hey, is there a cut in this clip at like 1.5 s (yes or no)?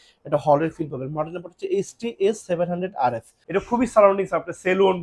no